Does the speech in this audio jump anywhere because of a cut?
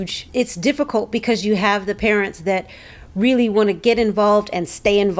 no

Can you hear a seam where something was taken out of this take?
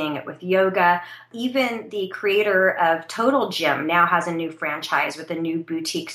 yes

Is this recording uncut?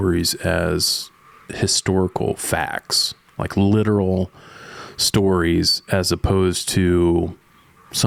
yes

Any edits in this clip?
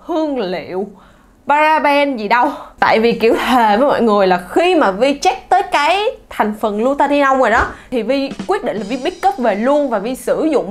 no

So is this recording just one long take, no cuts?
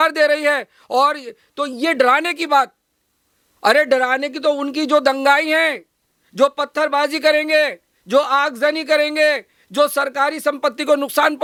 yes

